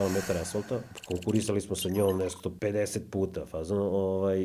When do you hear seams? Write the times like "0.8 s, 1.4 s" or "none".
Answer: 0.9 s, 2.5 s